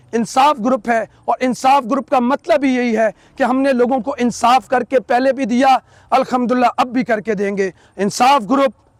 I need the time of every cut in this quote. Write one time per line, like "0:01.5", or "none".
none